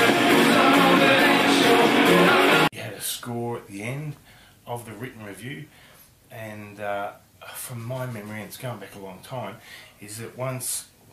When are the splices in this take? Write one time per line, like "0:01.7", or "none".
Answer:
none